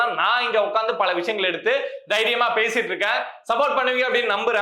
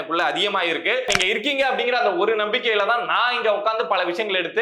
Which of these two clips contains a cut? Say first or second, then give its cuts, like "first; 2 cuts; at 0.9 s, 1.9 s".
second; 1 cut; at 1.1 s